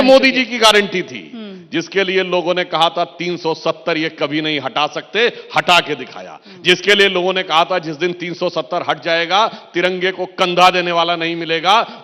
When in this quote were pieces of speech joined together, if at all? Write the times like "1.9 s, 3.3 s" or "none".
none